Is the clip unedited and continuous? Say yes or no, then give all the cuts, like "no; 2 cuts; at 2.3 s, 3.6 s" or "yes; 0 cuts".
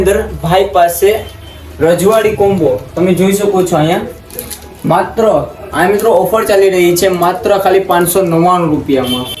yes; 0 cuts